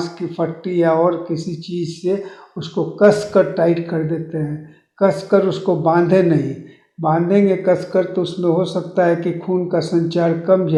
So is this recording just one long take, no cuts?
yes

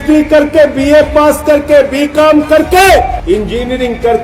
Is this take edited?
yes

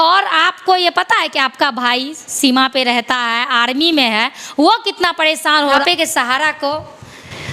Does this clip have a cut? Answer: yes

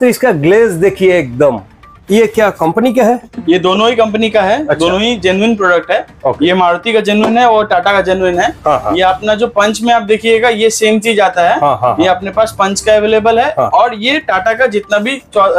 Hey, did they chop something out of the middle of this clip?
no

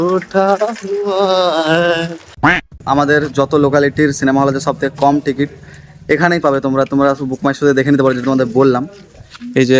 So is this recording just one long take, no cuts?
no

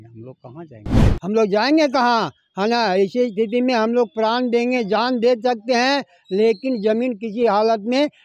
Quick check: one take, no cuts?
no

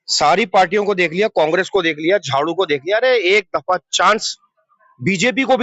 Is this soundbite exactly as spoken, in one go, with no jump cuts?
yes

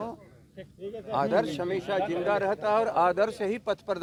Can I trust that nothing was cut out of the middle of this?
yes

